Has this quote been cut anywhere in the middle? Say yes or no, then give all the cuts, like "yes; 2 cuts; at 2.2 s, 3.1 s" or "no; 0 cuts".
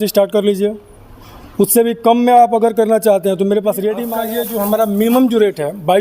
yes; 1 cut; at 4.1 s